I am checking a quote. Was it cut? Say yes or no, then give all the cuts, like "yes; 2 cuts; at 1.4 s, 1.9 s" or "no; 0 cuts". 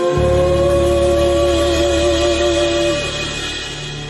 no; 0 cuts